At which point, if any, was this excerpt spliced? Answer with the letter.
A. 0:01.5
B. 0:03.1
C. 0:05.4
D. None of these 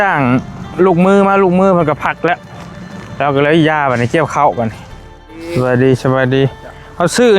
C